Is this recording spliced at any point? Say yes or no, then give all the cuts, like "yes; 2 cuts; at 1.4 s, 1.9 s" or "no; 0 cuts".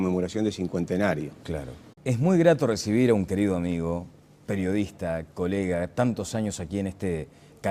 no; 0 cuts